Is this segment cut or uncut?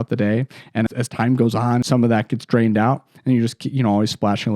cut